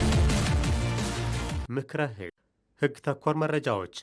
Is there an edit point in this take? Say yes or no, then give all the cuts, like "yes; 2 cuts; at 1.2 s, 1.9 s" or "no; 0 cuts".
no; 0 cuts